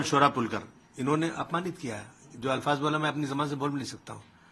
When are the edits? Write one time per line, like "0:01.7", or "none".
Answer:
none